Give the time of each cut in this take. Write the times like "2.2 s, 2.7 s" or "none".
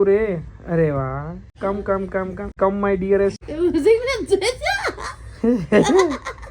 1.5 s, 2.5 s, 3.4 s

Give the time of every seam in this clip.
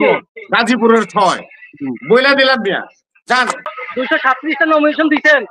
3.8 s

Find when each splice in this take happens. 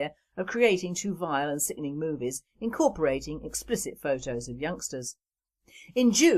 none

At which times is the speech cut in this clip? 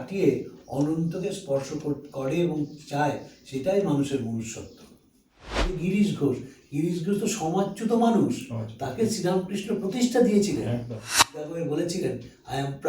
5.6 s, 11.5 s

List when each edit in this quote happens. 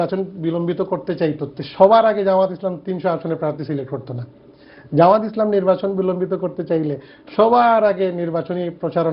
none

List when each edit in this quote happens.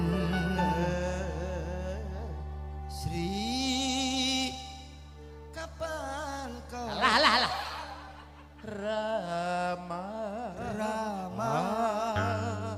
none

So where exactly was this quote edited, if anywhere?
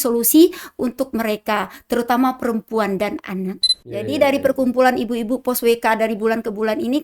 3.7 s

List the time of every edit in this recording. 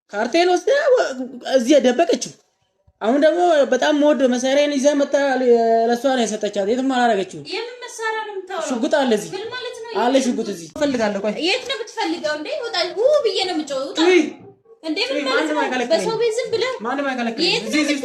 10.8 s

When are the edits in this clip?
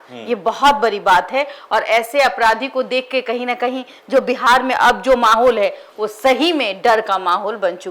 none

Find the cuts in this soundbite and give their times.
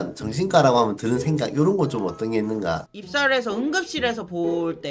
2.9 s

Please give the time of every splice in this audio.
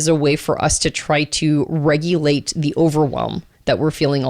none

